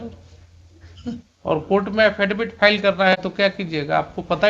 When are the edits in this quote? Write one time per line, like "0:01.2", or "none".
none